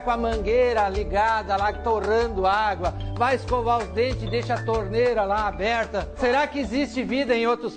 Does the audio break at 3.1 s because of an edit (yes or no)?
no